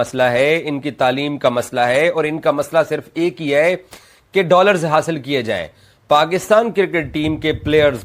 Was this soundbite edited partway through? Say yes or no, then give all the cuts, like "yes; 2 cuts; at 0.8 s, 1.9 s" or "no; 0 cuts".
yes; 1 cut; at 5.8 s